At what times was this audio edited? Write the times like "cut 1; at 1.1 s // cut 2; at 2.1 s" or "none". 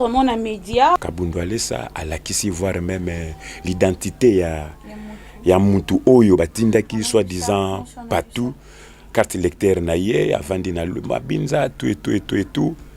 cut 1; at 1.0 s